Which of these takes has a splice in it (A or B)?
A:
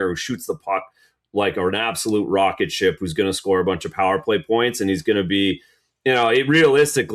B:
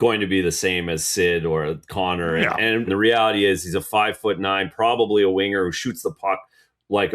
B